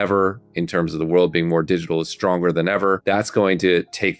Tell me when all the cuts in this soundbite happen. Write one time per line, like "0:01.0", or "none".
0:03.0